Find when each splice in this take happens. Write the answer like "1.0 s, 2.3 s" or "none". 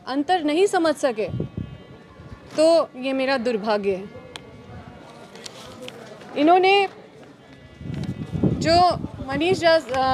none